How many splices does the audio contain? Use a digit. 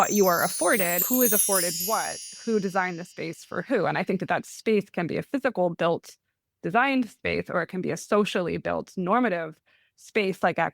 1